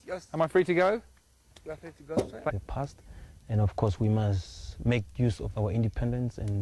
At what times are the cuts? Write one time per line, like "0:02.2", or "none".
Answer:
none